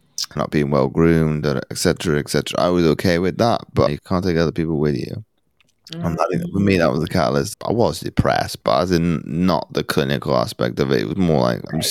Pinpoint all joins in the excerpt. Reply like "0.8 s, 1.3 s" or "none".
3.9 s